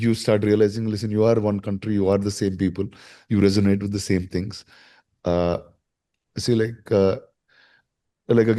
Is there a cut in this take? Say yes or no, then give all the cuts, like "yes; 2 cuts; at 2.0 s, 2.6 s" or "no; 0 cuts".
no; 0 cuts